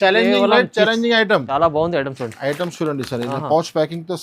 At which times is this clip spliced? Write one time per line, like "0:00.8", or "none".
0:01.5